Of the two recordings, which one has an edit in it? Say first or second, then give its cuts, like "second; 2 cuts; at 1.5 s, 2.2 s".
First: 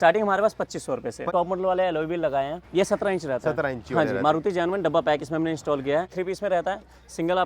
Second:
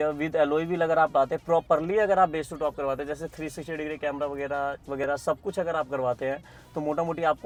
first; 3 cuts; at 1.3 s, 2.6 s, 6.1 s